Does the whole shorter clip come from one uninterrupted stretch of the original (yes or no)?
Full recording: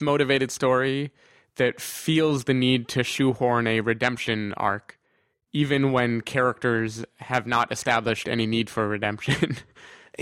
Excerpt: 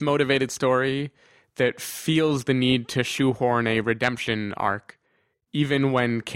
yes